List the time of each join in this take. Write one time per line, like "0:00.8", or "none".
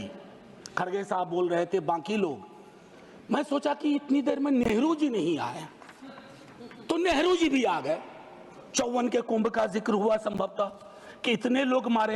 none